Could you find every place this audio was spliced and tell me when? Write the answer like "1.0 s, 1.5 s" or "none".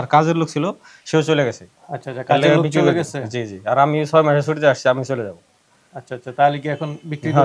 none